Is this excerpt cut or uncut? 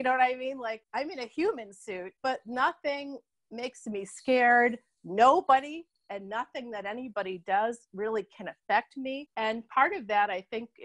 uncut